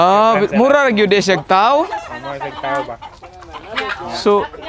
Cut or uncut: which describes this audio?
uncut